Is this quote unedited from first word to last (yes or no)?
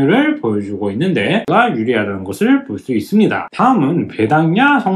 no